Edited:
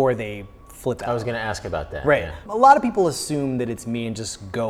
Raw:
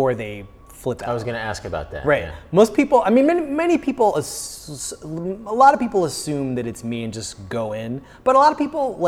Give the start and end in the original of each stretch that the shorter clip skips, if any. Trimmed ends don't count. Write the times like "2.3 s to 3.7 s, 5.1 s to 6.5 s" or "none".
2.4 s to 5.4 s

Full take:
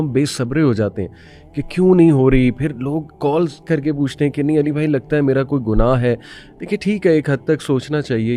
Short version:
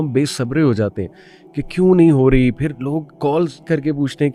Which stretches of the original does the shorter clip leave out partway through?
none

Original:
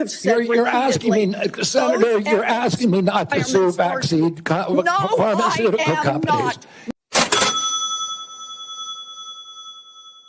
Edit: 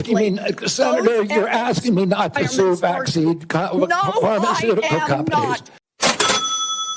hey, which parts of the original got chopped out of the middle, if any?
6.7 s to 6.9 s

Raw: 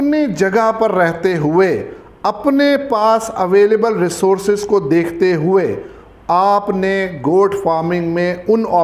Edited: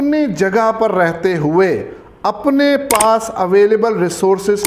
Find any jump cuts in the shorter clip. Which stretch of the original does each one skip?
none

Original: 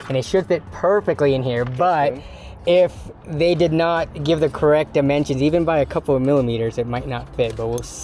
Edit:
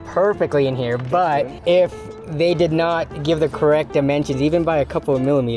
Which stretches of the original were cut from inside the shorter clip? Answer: 2.2 s to 2.5 s

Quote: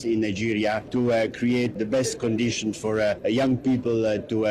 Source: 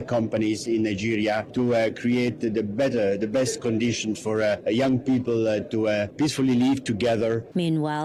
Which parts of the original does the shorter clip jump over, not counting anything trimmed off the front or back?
2.4 s to 3.2 s

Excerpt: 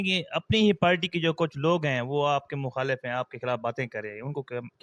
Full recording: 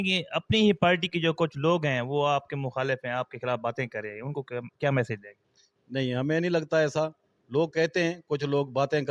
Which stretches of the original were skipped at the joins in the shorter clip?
none

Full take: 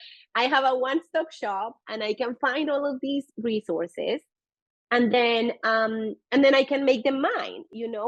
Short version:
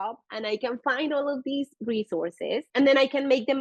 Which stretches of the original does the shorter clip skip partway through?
4.2 s to 6.2 s

